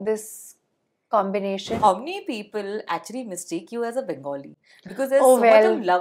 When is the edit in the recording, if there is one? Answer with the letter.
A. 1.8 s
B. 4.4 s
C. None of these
A